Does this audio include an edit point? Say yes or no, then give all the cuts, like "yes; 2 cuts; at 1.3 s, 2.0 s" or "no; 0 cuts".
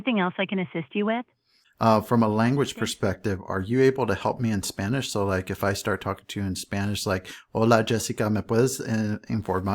yes; 1 cut; at 1.0 s